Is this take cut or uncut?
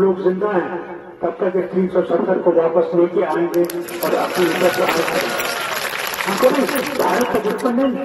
uncut